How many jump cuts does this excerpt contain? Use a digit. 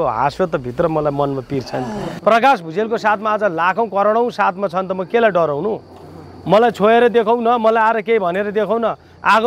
1